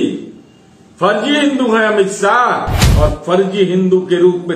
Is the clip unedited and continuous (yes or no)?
no